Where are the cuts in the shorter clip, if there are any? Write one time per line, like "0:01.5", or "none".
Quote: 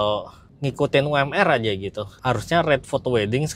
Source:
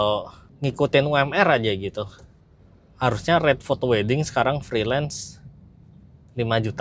0:02.1